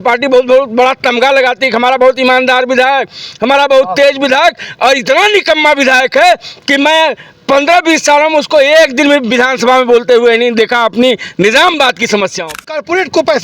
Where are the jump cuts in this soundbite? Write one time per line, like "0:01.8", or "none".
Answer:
0:12.5